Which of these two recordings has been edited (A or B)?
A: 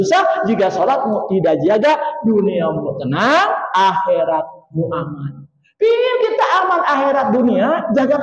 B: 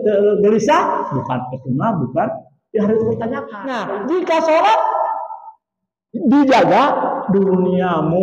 B